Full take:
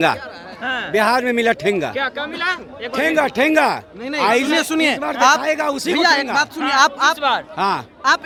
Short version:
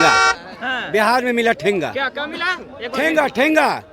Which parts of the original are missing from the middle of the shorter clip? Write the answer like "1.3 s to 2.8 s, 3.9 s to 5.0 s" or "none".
none